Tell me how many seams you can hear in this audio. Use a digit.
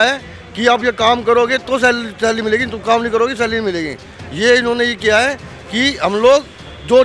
0